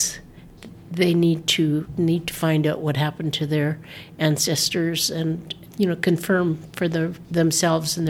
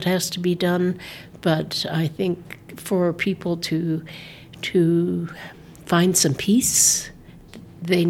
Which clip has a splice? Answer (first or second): first